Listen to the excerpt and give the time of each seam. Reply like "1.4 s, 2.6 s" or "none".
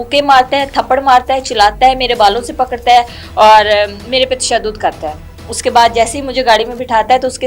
none